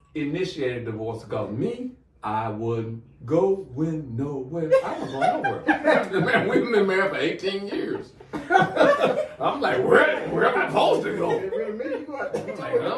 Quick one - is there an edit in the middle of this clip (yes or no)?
no